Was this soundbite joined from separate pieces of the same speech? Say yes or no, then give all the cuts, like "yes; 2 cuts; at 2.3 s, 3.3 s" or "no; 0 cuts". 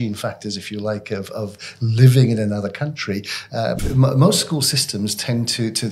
yes; 1 cut; at 3.8 s